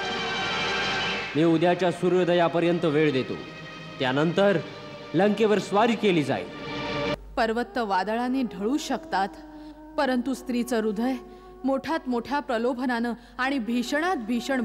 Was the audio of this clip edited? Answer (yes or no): yes